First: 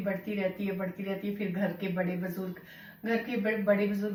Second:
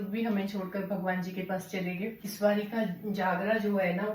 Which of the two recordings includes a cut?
second; 1 cut; at 2.2 s

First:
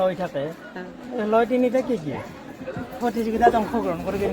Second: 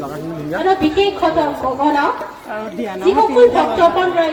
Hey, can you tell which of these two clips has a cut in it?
first; 1 cut; at 3.0 s

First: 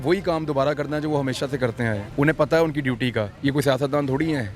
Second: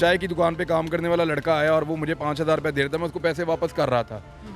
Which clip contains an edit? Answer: first; 2 cuts; at 2.0 s, 3.3 s

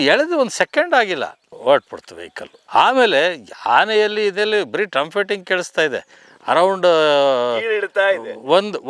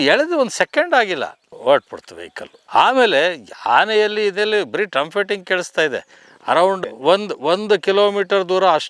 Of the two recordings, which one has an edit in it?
second; 1 cut; at 6.8 s

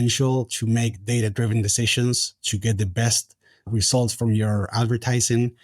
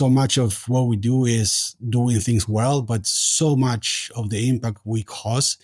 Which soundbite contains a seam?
first; 1 cut; at 3.7 s

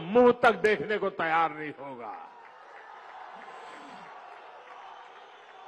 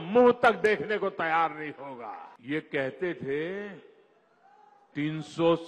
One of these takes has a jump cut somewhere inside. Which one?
second; 1 cut; at 2.3 s

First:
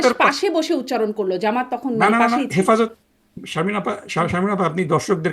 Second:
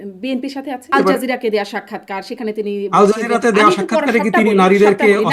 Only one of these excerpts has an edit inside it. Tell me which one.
second; 1 cut; at 0.9 s

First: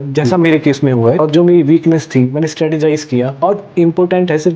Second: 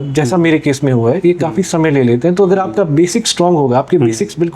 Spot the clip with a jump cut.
first; 1 cut; at 1.2 s

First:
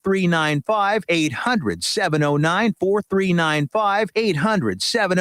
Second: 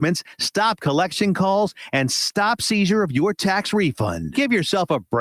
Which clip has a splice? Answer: first; 2 cuts; at 1.0 s, 4.1 s

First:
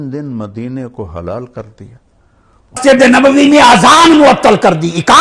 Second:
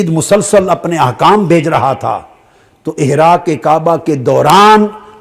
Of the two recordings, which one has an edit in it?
first; 1 cut; at 2.8 s

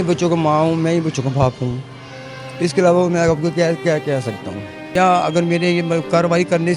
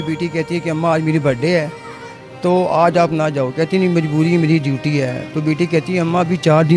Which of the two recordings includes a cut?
first; 1 cut; at 4.8 s

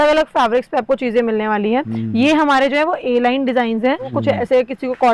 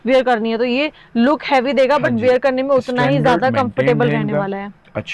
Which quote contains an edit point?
first; 1 cut; at 4.2 s

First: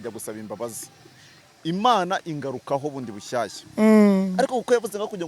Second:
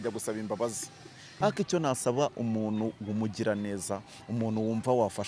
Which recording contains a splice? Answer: second; 1 cut; at 1.4 s

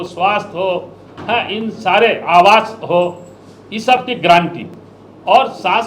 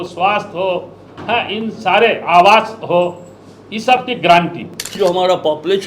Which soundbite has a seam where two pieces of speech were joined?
second; 1 cut; at 4.9 s

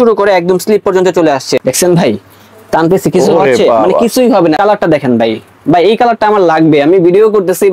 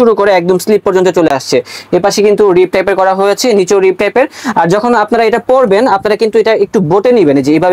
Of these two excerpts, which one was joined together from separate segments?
first; 2 cuts; at 1.6 s, 4.6 s

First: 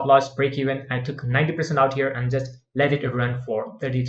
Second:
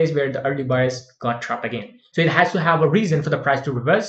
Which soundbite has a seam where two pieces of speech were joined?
second; 1 cut; at 2.0 s

